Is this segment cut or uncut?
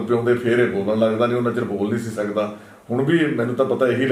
uncut